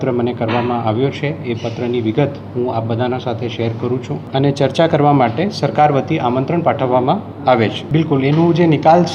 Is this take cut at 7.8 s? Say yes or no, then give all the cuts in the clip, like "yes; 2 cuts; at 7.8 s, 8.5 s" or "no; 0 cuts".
yes; 2 cuts; at 4.2 s, 7.8 s